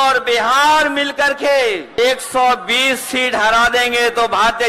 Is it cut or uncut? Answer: cut